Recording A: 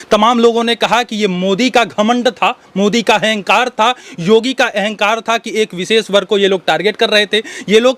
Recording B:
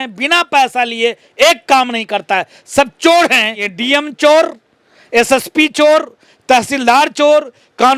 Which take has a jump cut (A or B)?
B